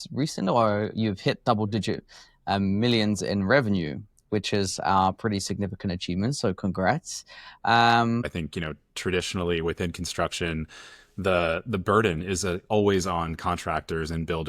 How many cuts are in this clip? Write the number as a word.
one